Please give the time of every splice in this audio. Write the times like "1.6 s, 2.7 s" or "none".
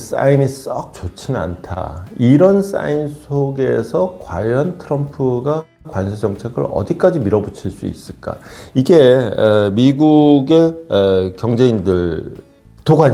none